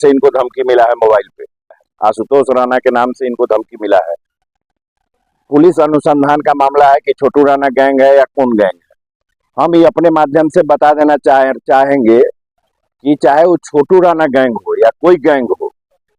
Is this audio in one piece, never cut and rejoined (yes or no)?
no